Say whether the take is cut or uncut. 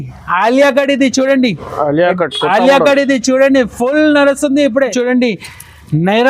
cut